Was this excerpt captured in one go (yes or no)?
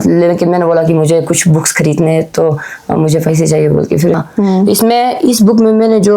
no